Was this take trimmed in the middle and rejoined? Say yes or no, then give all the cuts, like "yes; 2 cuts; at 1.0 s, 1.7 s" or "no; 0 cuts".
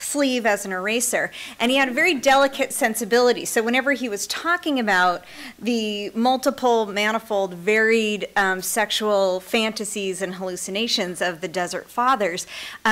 yes; 1 cut; at 4.4 s